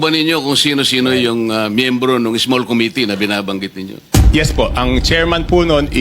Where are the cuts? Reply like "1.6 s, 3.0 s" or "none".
4.2 s